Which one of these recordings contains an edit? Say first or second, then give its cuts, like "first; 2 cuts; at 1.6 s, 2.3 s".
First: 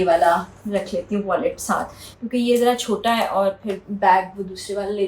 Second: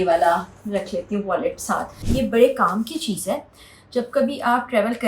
second; 1 cut; at 1.9 s